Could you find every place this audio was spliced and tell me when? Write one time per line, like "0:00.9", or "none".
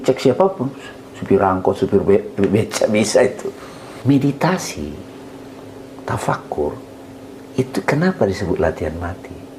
0:03.9